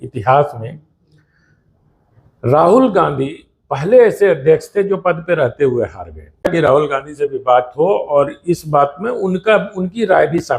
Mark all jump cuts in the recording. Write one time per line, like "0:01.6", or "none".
0:06.4